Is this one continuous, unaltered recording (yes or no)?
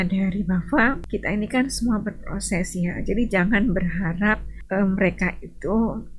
no